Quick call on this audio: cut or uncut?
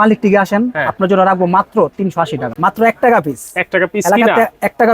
cut